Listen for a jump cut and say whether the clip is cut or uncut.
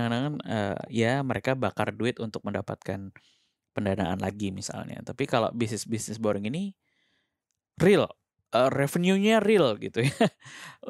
uncut